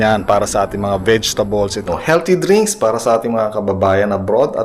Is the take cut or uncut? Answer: cut